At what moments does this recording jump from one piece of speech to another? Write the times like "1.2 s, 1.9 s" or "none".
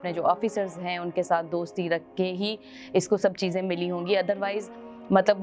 none